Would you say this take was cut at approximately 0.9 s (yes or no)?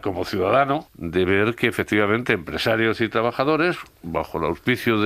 yes